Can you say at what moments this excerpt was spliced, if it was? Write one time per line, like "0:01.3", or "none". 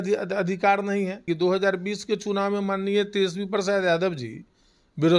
0:01.2